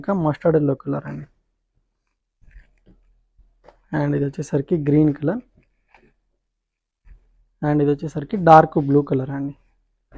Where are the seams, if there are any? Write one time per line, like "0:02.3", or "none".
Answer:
none